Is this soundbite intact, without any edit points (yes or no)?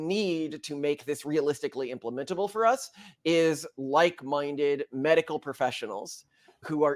yes